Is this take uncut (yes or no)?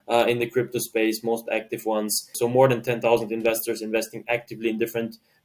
no